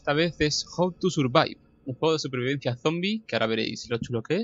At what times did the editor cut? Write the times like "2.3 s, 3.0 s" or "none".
none